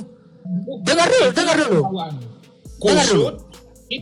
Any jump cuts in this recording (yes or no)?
no